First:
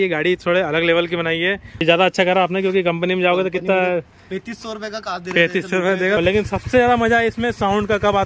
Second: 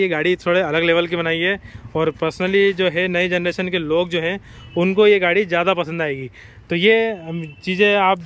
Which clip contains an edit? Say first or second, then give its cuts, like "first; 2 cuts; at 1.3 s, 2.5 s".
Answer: first; 2 cuts; at 1.8 s, 6.2 s